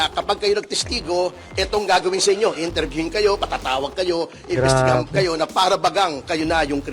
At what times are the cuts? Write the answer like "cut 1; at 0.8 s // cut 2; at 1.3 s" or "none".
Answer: none